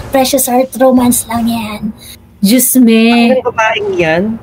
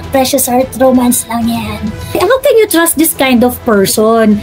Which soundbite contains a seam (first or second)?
second